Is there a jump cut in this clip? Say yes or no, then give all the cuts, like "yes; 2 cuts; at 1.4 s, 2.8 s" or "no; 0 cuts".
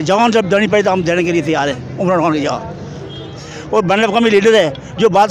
yes; 1 cut; at 2.9 s